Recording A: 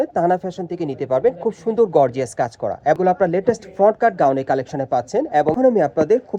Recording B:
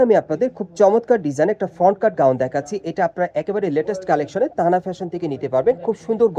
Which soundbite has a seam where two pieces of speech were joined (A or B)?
A